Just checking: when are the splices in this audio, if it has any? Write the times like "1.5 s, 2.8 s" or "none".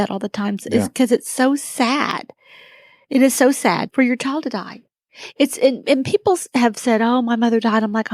3.8 s